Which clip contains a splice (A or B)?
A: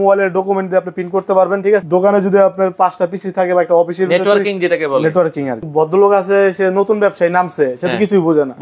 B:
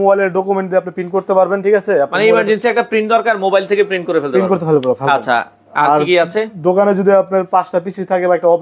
A